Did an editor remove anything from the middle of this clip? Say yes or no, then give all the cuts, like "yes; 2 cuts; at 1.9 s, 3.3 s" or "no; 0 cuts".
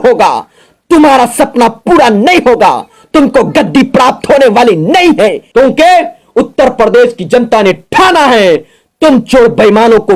yes; 1 cut; at 5.4 s